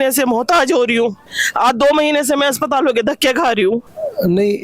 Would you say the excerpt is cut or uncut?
cut